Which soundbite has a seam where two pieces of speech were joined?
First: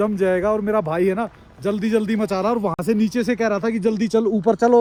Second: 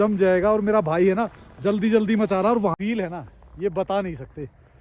second; 1 cut; at 2.8 s

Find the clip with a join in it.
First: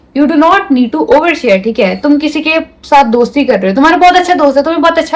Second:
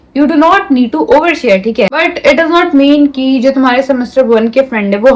second; 1 cut; at 1.9 s

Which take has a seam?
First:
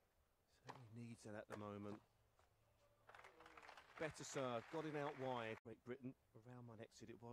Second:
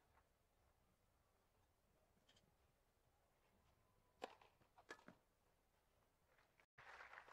first; 1 cut; at 6.2 s

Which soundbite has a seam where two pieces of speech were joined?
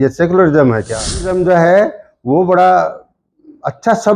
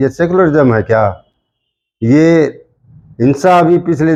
first; 1 cut; at 1.3 s

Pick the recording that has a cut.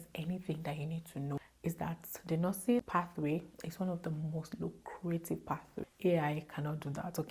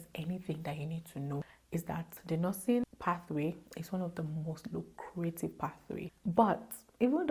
first; 2 cuts; at 2.8 s, 5.9 s

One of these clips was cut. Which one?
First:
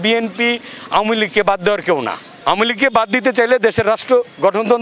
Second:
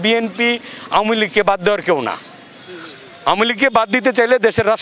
first; 1 cut; at 2.2 s

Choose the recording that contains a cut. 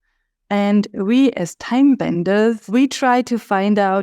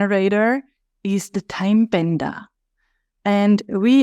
first; 1 cut; at 2.6 s

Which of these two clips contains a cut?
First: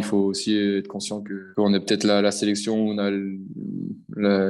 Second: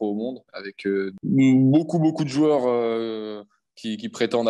first; 1 cut; at 1.4 s

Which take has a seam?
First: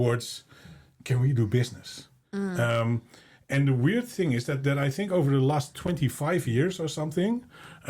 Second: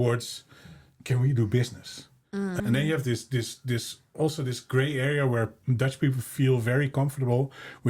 second; 1 cut; at 2.6 s

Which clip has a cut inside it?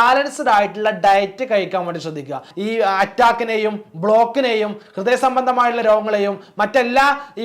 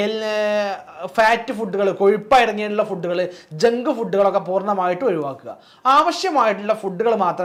first; 1 cut; at 2.5 s

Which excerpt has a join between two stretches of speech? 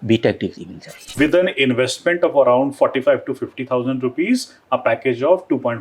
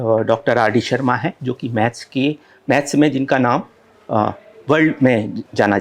first; 1 cut; at 0.9 s

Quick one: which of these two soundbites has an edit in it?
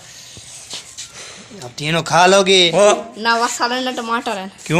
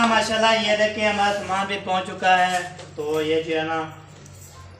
first; 1 cut; at 2.7 s

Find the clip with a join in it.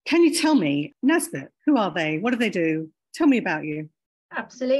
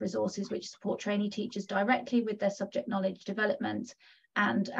first; 1 cut; at 0.9 s

